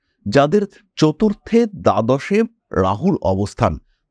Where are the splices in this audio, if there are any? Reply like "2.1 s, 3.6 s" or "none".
none